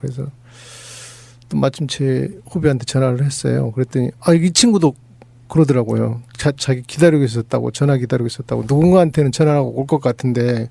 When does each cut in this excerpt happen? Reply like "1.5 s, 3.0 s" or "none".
8.4 s